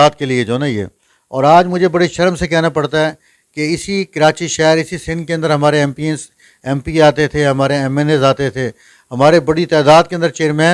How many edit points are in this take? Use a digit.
0